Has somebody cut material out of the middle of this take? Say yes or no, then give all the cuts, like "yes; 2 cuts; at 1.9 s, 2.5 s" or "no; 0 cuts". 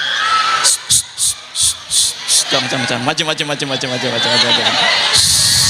no; 0 cuts